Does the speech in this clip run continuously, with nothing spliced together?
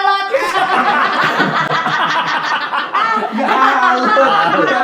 yes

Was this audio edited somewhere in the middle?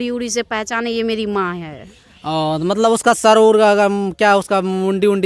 no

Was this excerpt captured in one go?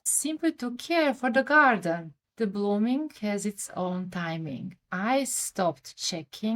no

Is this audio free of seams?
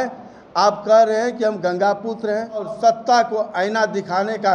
no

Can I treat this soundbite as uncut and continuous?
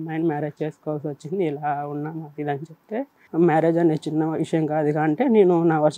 no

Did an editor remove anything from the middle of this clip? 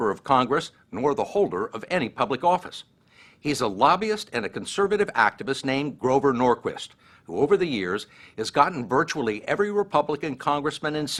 no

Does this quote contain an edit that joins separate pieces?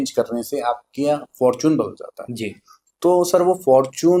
no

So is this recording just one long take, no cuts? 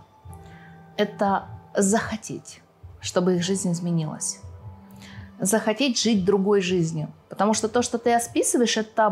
yes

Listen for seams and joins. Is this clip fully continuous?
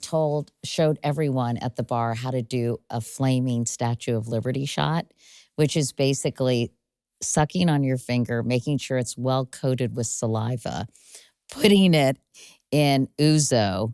yes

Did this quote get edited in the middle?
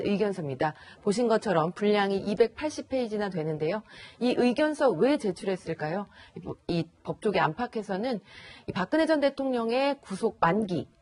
yes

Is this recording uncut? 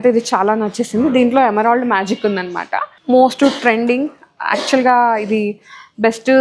no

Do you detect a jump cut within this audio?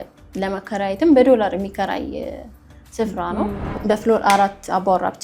yes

